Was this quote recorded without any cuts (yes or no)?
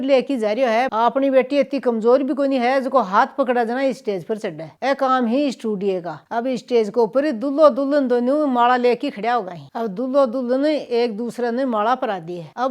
yes